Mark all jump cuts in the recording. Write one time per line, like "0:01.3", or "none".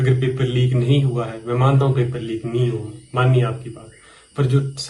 none

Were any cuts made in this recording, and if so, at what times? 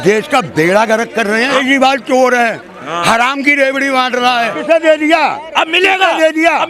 0:01.6
0:04.6

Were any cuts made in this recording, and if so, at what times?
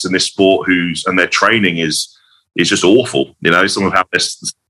none

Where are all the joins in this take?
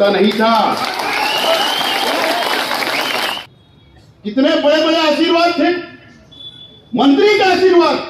0:03.4

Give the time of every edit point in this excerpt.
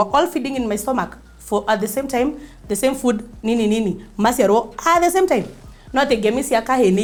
none

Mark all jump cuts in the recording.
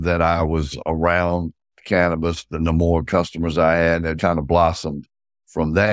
0:04.2

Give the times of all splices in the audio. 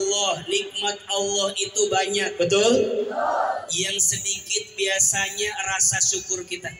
none

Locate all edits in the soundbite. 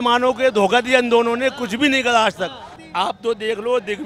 0:02.8

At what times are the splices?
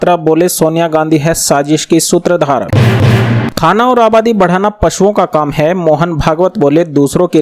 0:02.7

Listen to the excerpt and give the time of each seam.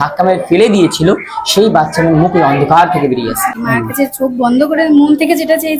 0:03.6

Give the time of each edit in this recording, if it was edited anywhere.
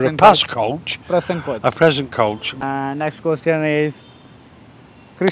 0:02.5

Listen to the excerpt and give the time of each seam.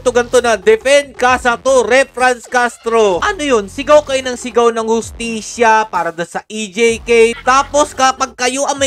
0:03.3
0:07.4

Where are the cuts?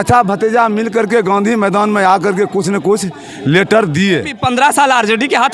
0:04.4

